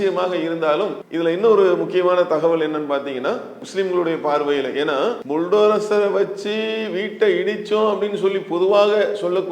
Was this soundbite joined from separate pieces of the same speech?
yes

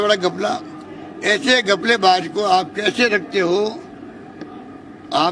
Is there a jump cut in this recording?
no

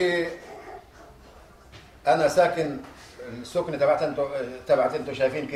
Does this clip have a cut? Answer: no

